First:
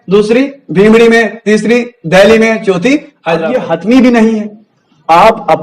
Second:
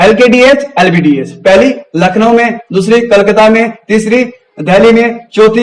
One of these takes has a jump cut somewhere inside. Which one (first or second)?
first